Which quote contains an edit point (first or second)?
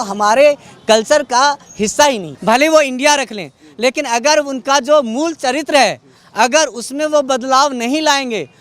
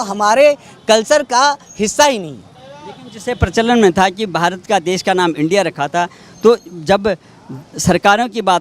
first